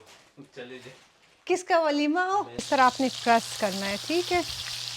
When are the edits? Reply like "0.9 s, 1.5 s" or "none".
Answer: 2.6 s